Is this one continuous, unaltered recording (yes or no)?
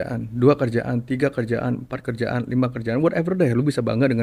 yes